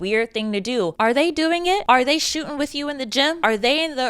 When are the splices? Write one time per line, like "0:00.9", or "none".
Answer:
0:01.8
0:03.4